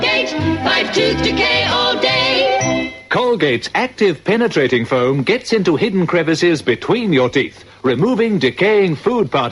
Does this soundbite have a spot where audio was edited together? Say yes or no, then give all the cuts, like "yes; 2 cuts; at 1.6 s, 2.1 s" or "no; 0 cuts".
no; 0 cuts